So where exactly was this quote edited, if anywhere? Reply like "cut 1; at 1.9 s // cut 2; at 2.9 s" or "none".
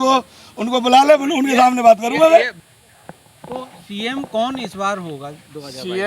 cut 1; at 2.6 s